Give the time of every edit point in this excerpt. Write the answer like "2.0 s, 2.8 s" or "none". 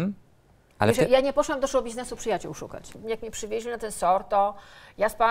2.9 s